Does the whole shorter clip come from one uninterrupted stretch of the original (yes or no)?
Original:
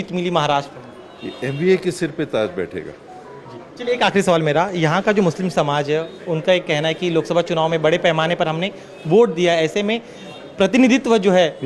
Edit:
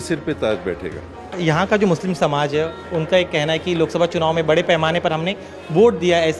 no